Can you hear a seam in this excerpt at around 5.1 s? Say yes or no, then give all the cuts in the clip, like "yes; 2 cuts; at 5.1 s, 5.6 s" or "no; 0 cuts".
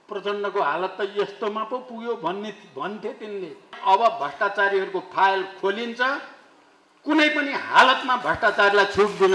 no; 1 cut; at 3.7 s